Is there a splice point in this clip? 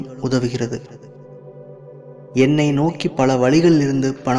yes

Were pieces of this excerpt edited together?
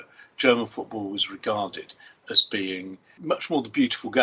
yes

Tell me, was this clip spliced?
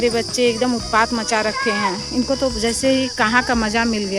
no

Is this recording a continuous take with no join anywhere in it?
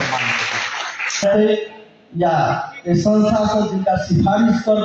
no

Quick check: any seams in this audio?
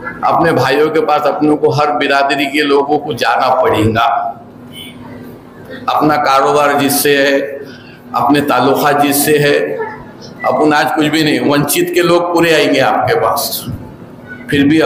no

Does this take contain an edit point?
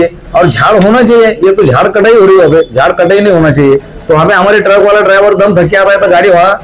no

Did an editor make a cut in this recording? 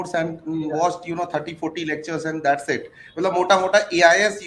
no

